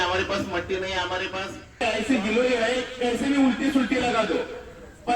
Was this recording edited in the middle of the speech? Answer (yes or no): yes